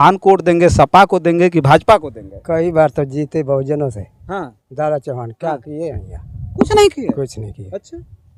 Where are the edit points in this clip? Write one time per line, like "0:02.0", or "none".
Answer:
none

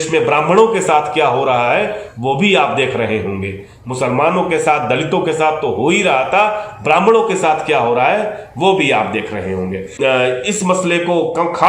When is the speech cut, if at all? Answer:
none

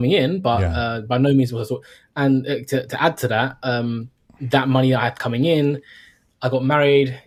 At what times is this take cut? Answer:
none

